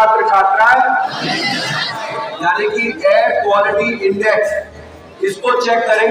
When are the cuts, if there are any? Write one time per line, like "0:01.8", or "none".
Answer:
0:02.2